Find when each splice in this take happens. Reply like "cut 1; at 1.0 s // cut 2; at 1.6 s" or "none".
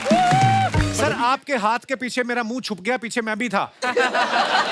cut 1; at 1.0 s